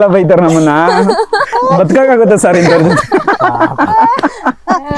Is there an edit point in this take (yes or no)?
no